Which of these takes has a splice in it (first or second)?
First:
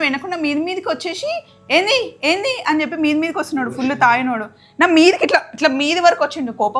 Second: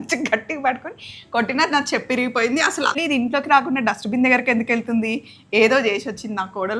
second